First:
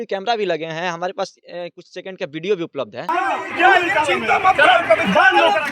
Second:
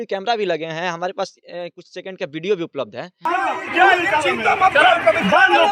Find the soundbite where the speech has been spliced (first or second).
first